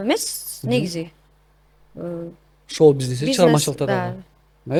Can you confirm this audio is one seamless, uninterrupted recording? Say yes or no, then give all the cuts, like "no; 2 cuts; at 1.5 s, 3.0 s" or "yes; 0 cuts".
yes; 0 cuts